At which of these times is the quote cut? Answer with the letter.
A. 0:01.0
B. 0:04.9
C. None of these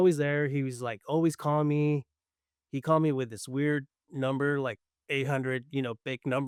C